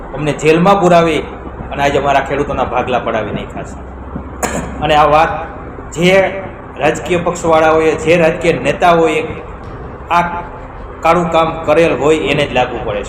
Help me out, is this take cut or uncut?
uncut